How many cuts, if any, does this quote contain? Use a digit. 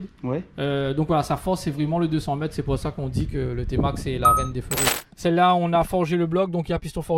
1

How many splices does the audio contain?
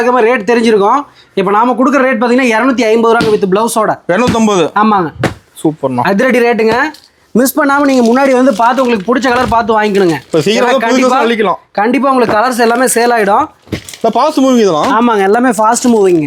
0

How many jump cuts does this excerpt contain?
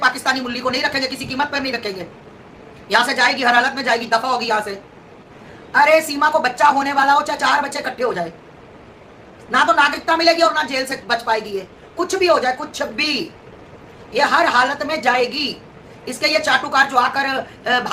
0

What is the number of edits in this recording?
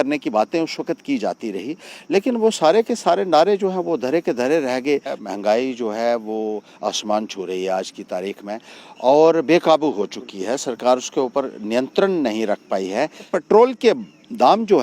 2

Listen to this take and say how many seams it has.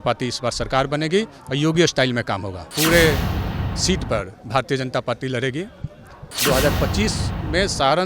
2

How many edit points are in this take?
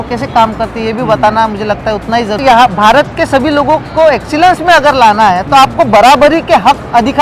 1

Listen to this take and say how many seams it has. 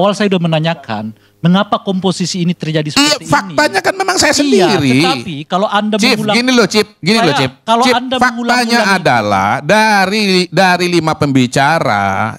0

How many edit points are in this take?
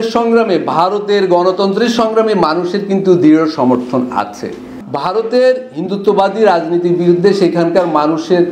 1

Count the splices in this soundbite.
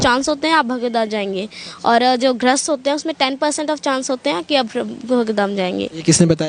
0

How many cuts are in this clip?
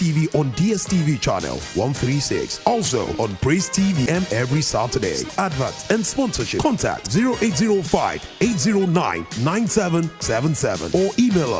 1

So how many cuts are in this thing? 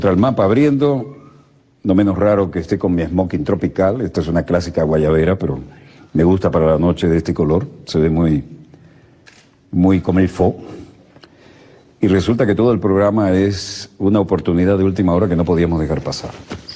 0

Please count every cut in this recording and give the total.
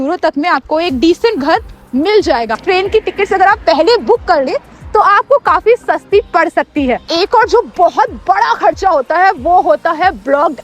2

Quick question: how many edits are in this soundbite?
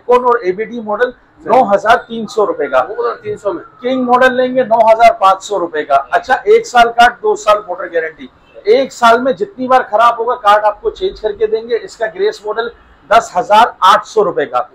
0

